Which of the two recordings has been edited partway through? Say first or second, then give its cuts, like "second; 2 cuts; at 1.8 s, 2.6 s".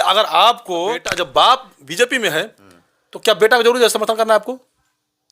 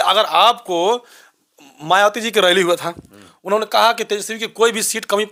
first; 1 cut; at 1.1 s